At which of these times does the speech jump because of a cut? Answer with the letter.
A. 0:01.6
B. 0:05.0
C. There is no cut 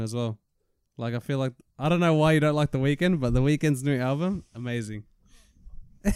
C